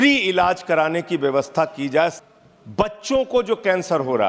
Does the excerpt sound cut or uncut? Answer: cut